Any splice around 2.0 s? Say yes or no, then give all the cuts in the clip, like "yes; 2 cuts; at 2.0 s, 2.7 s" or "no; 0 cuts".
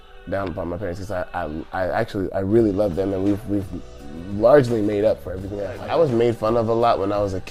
no; 1 cut; at 5.7 s